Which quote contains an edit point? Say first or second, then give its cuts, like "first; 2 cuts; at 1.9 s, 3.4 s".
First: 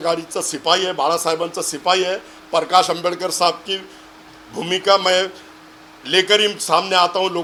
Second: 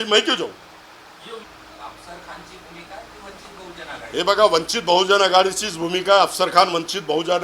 second; 1 cut; at 1.5 s